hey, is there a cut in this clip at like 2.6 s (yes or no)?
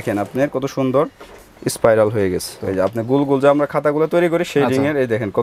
yes